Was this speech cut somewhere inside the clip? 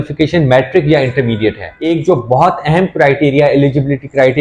yes; 1 cut; at 1.7 s

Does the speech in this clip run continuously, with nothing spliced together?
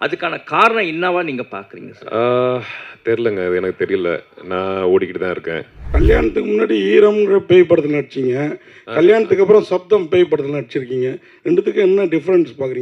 no; 1 cut; at 5.8 s

